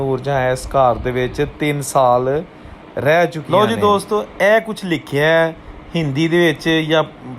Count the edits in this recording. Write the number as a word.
one